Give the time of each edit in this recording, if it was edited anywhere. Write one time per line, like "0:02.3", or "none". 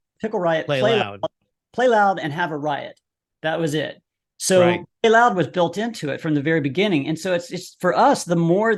none